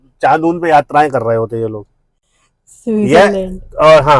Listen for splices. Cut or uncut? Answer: uncut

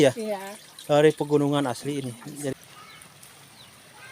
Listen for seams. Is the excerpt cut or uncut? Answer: cut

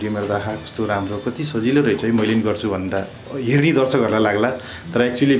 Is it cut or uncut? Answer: uncut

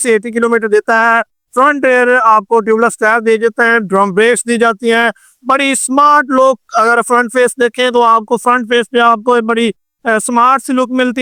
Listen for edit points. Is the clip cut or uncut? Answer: uncut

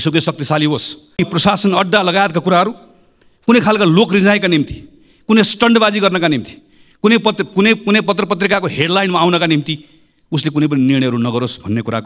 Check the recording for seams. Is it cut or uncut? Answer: cut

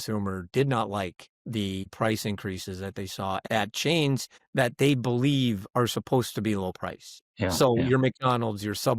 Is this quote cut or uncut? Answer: cut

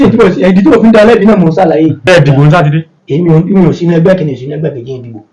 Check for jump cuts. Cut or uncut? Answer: cut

